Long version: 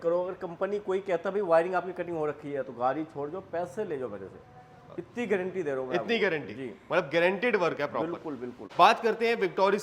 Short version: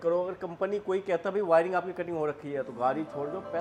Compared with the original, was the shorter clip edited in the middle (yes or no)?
no